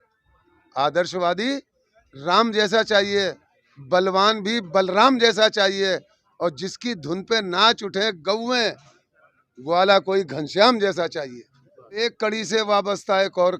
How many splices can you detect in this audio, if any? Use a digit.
1